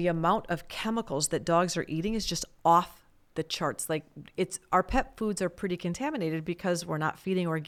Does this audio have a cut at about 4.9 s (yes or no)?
no